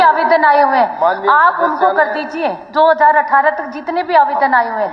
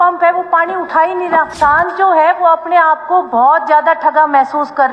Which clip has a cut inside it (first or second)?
second